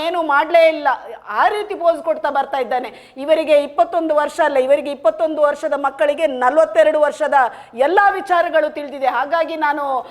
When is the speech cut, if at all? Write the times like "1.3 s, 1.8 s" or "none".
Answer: none